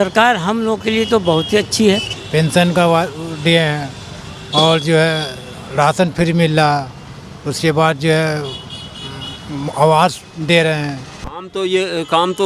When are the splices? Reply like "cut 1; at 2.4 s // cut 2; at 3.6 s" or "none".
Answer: cut 1; at 2.1 s // cut 2; at 11.2 s